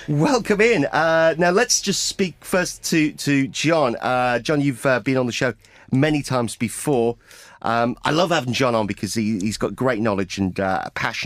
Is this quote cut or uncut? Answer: uncut